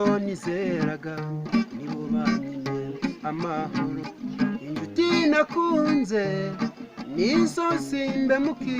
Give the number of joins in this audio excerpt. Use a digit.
1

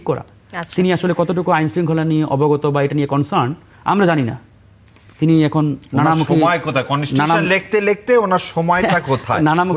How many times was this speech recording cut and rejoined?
0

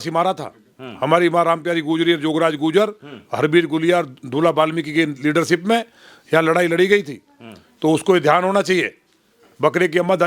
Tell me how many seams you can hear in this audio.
0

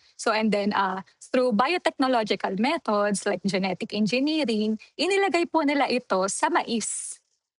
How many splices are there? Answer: 0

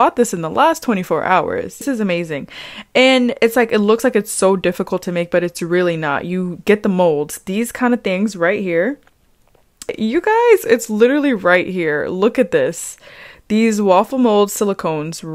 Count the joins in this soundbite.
2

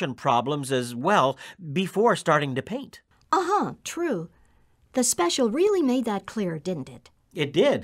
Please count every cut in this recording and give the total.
0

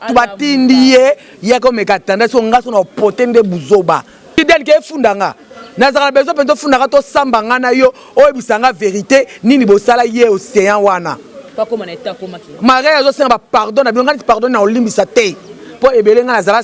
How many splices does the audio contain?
1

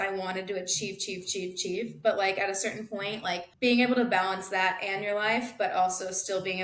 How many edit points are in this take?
1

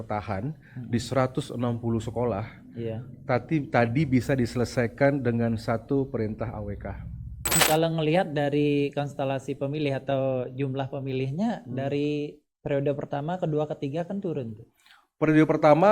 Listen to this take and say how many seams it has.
1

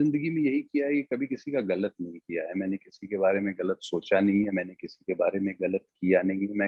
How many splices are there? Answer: 0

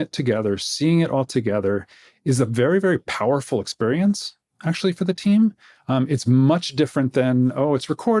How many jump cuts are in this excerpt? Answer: 0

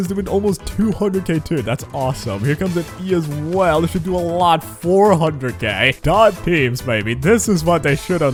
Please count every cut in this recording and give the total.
0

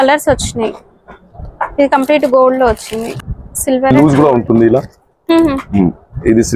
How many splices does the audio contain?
1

